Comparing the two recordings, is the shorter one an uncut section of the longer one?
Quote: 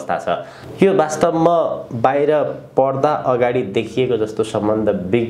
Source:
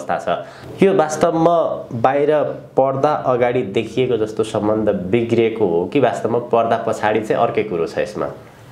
yes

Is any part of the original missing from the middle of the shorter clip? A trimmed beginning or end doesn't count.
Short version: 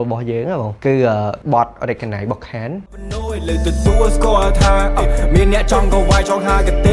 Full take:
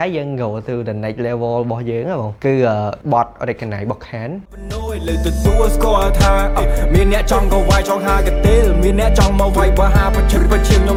no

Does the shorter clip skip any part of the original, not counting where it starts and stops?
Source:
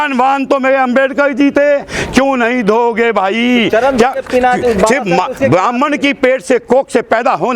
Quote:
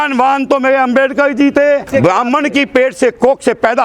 yes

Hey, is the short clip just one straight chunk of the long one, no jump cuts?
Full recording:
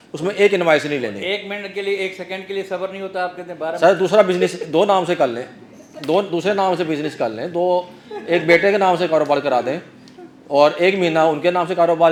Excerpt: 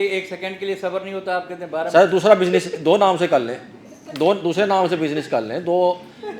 yes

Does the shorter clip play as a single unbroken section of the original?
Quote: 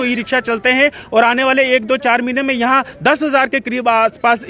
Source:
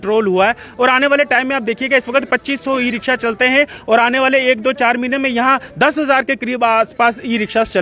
yes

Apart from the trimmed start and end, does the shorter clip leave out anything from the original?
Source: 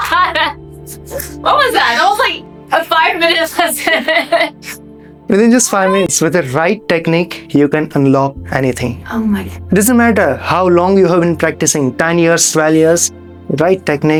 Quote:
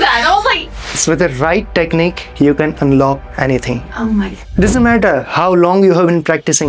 yes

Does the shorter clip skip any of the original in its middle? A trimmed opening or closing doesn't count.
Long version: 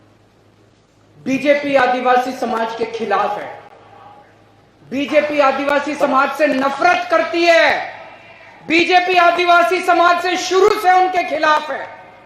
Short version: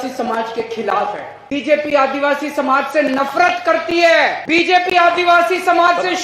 yes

